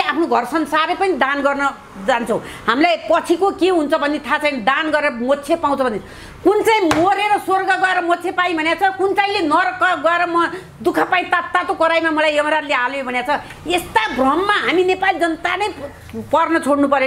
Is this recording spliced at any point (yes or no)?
no